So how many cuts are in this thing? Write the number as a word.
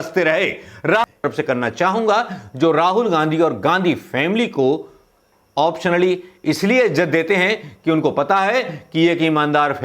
one